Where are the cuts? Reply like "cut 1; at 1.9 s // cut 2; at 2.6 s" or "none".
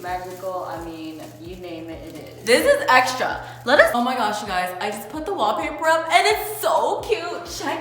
cut 1; at 3.9 s